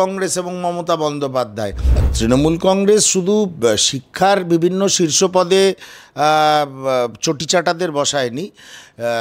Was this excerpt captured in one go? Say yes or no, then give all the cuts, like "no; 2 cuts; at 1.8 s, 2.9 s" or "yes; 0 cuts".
no; 1 cut; at 2.0 s